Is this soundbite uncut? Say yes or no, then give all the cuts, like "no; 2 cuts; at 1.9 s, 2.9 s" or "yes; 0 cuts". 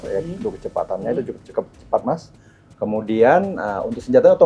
yes; 0 cuts